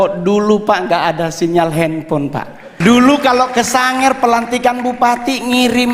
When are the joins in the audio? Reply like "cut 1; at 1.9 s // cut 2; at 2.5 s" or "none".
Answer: cut 1; at 2.6 s